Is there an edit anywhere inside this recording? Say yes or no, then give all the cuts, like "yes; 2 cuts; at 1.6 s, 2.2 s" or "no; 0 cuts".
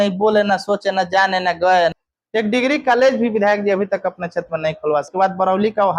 yes; 2 cuts; at 1.9 s, 5.1 s